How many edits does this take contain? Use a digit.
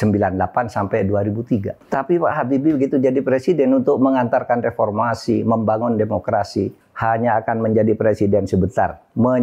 2